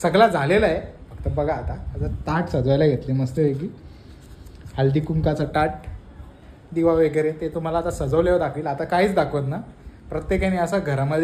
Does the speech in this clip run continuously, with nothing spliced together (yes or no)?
yes